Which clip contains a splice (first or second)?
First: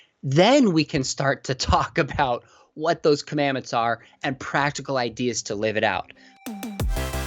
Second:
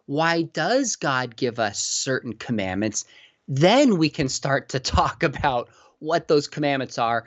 first